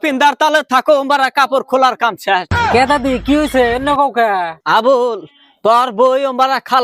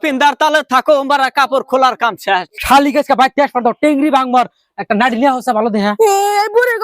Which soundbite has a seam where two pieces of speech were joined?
second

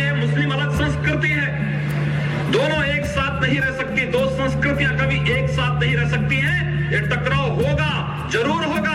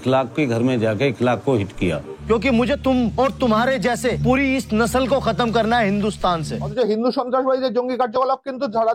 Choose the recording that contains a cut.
second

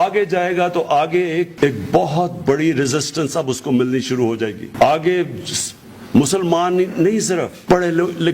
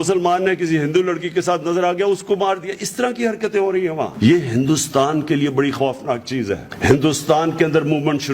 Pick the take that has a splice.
second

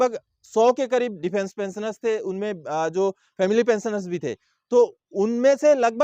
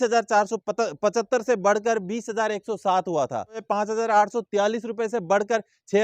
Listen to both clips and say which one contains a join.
second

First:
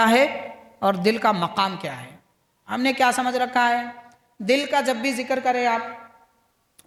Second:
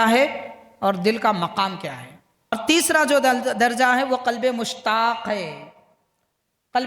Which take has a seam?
second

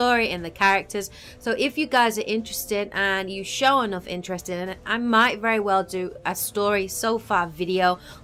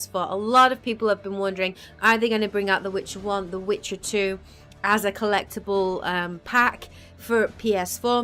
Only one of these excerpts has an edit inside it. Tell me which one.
second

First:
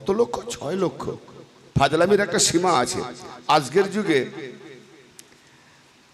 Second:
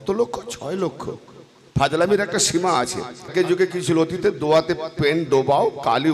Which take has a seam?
second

